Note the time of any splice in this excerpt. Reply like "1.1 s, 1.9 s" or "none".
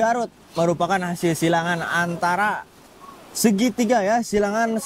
none